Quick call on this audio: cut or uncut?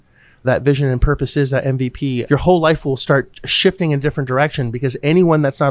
cut